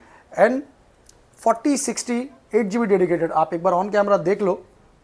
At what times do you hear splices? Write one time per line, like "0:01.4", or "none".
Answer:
none